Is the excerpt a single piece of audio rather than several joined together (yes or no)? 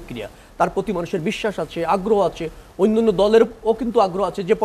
yes